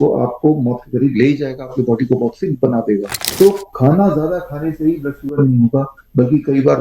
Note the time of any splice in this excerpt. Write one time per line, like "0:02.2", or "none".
0:03.2